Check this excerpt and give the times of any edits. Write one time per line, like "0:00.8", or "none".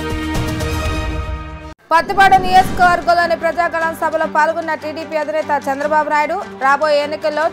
0:01.6